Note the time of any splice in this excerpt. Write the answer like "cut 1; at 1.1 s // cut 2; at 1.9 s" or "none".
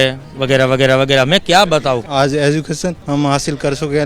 cut 1; at 2.0 s // cut 2; at 3.0 s